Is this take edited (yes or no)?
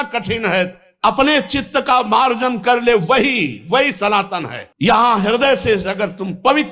yes